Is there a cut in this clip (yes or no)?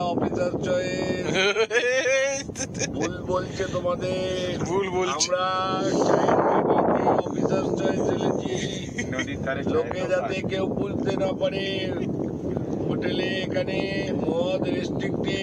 no